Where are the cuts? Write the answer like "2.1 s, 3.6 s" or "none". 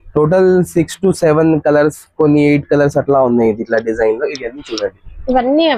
none

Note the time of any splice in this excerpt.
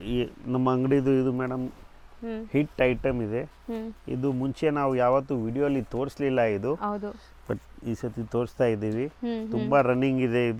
none

